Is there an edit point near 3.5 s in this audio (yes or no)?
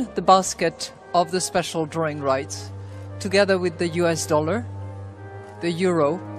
yes